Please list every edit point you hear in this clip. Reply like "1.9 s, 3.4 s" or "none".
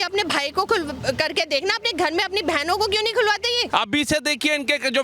3.7 s